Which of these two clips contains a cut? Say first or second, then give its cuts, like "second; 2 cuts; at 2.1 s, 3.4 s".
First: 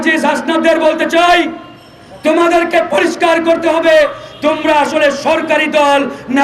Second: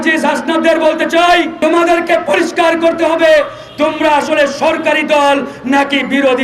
second; 1 cut; at 1.5 s